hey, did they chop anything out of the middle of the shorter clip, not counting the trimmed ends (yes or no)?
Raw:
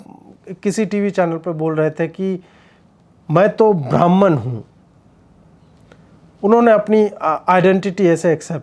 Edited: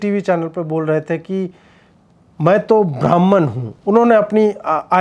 yes